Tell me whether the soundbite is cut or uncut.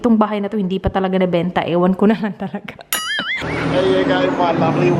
cut